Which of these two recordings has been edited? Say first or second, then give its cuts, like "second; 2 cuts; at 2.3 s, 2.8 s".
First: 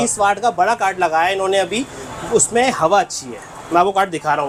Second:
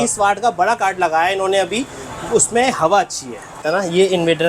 second; 1 cut; at 3.6 s